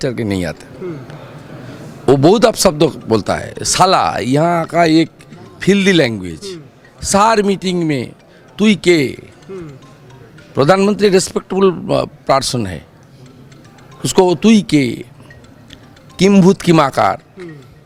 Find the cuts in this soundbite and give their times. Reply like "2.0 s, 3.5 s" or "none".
none